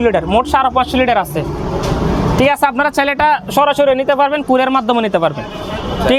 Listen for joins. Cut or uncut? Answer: uncut